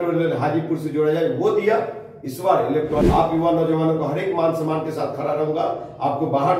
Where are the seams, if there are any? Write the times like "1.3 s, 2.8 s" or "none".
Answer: 3.0 s